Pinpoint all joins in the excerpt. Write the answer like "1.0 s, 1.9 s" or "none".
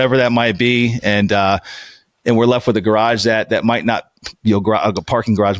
none